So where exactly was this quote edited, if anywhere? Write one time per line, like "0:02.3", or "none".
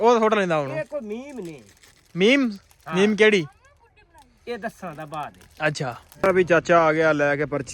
0:06.0

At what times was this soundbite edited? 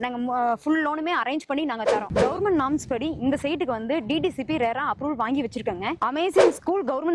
0:02.1
0:06.0

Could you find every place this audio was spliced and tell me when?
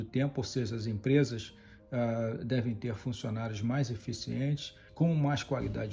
0:04.8

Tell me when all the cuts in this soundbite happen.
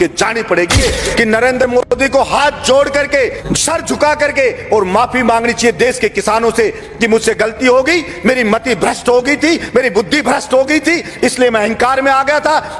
0:00.8
0:03.4

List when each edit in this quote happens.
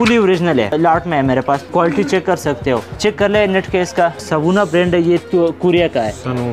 0:00.7
0:01.7
0:02.9
0:04.3

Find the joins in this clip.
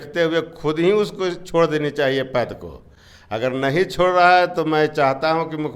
none

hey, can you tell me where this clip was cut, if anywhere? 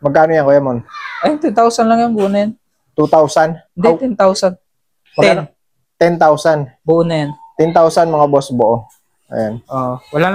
none

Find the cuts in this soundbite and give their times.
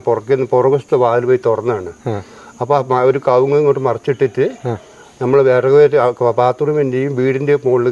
none

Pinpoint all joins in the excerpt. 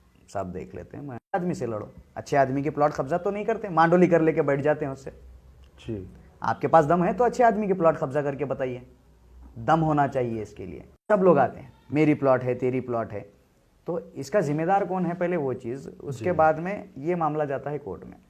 0:01.3
0:11.1

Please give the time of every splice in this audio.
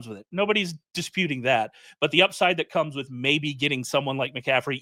none

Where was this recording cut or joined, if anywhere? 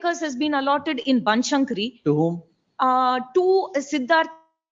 none

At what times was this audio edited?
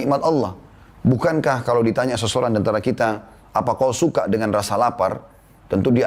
none

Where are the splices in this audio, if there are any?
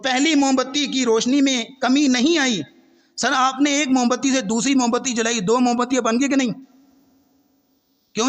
none

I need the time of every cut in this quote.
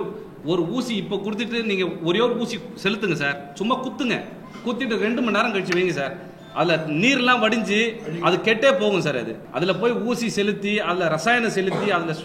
0:09.4

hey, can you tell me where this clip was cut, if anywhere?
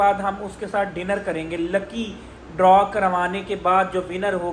none

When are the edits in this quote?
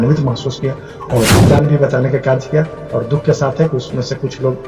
0:01.4

